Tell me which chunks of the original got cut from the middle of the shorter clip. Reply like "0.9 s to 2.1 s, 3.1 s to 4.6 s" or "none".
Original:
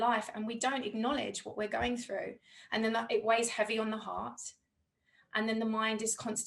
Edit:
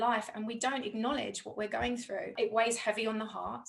2.3 s to 3.1 s